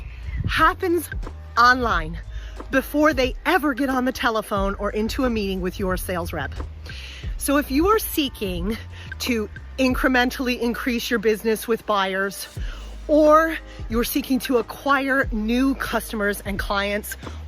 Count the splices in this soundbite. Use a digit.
0